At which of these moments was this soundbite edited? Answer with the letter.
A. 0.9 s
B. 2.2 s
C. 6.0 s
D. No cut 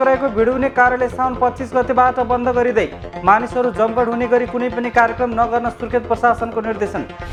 D